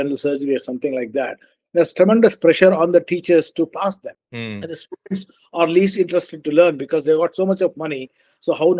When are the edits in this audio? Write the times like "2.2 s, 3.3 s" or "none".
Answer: 4.2 s